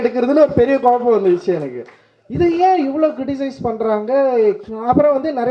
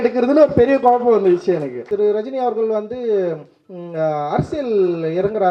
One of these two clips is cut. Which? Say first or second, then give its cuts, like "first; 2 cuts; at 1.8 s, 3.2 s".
second; 1 cut; at 1.9 s